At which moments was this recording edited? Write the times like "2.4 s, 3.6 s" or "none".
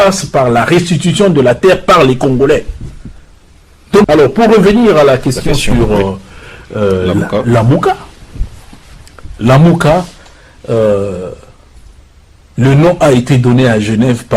4.0 s